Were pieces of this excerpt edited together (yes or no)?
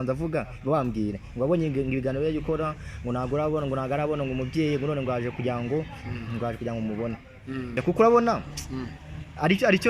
yes